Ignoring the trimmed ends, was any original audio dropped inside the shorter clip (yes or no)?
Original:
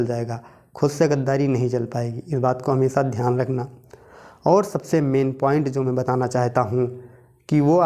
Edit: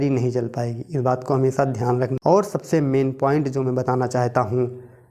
yes